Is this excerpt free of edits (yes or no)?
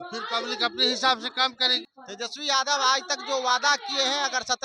no